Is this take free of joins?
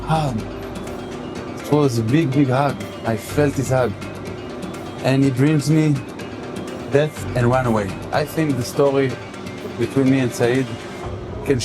no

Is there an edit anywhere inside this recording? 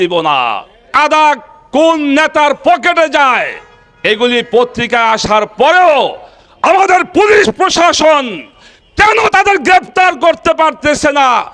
yes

